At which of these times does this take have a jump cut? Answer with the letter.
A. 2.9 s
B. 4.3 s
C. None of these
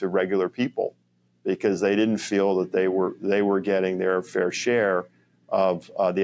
C